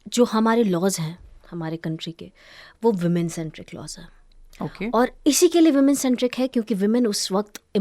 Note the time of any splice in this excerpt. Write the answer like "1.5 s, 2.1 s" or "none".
none